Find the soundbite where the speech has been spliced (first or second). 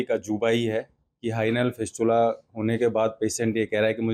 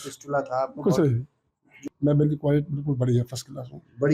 second